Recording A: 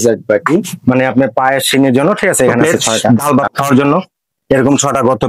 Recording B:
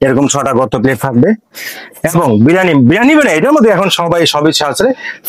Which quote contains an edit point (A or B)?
A